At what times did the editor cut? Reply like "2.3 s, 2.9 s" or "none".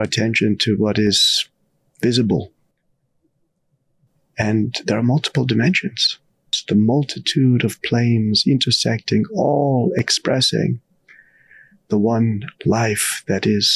6.5 s